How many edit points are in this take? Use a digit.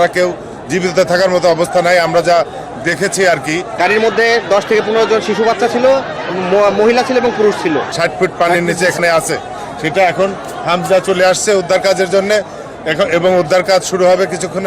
2